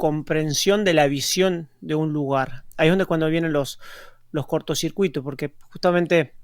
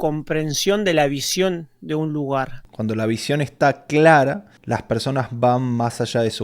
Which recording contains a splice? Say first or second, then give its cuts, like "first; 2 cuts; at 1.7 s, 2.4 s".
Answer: second; 2 cuts; at 2.6 s, 4.5 s